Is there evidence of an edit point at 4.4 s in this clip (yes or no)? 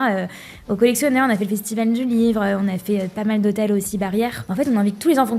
yes